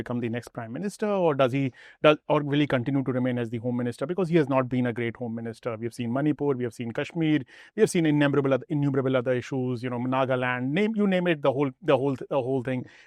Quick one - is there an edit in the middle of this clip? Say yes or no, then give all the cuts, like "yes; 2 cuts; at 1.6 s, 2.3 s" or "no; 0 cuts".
no; 0 cuts